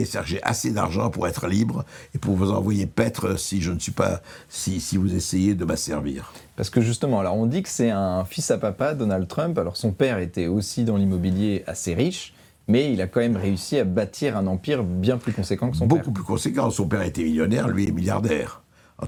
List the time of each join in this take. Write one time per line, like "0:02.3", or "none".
none